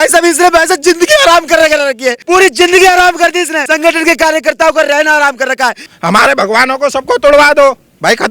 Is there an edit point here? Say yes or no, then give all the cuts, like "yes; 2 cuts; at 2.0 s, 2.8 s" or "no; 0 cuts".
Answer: yes; 3 cuts; at 2.1 s, 3.6 s, 5.9 s